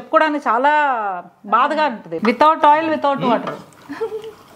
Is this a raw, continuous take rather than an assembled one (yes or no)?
no